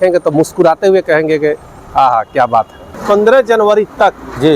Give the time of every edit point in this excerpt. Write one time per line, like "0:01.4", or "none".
0:03.0

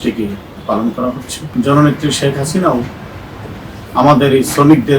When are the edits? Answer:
0:01.3

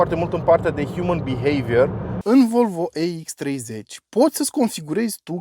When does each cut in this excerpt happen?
0:02.1

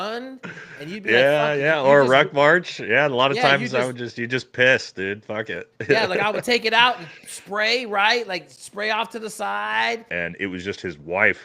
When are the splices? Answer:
0:10.1

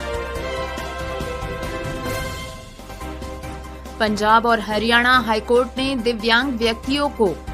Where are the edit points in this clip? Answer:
0:04.0

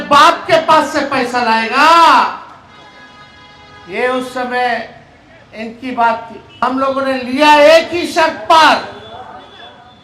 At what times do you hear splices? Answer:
0:06.6

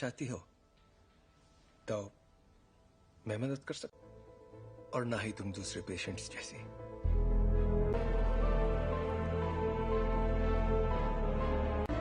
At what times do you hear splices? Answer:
0:08.0

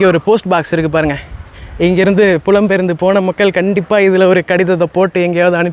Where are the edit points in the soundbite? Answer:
none

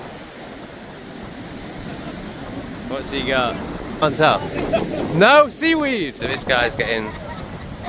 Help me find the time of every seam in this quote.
0:04.0
0:06.2

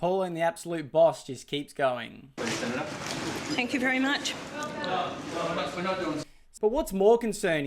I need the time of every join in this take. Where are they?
0:06.5

